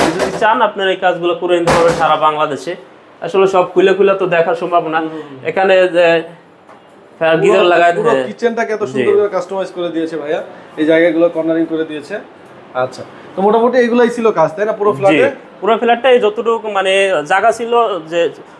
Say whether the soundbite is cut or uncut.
uncut